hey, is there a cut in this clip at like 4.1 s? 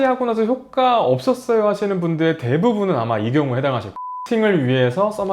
yes; 1 cut; at 4.1 s

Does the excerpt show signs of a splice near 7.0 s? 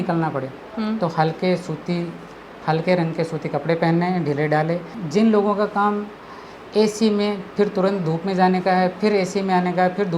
no; 1 cut; at 5.0 s

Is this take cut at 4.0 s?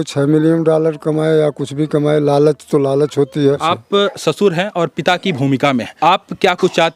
yes; 2 cuts; at 4.0 s, 5.9 s

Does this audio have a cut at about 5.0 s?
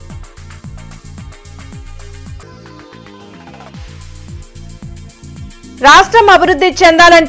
yes; 1 cut; at 5.0 s

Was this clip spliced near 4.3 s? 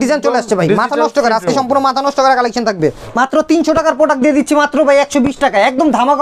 no; 1 cut; at 3.0 s

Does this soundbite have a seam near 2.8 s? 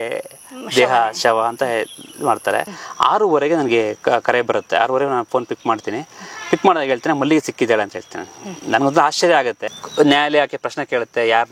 yes; 2 cuts; at 2.8 s, 9.7 s

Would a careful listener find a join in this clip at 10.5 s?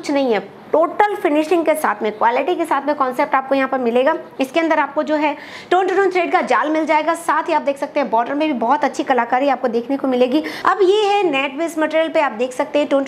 yes; 1 cut; at 10.5 s

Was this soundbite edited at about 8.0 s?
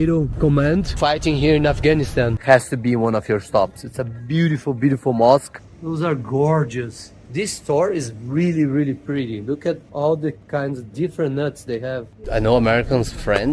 no; 3 cuts; at 2.4 s, 5.5 s, 12.2 s

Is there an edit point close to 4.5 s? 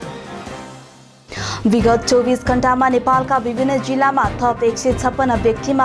no; 1 cut; at 1.0 s

